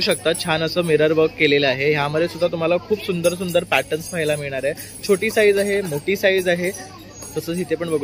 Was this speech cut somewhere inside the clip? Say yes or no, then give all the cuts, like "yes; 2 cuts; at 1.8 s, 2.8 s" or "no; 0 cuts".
no; 0 cuts